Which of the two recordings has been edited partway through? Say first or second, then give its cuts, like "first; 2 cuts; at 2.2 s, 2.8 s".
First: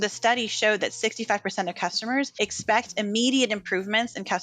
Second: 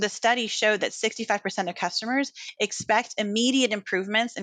first; 1 cut; at 2.3 s